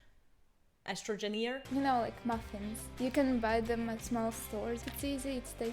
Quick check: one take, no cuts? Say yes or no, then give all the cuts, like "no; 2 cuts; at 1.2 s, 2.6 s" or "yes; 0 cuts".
no; 4 cuts; at 1.6 s, 2.8 s, 4.0 s, 4.9 s